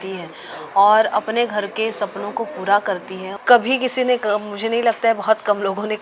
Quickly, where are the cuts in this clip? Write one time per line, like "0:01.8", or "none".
0:03.3